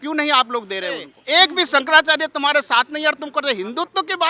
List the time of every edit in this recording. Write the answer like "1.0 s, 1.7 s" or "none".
1.1 s

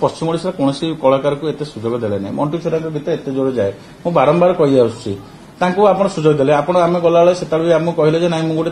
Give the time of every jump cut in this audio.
none

